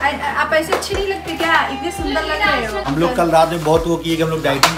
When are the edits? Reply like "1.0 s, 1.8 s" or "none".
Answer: 2.9 s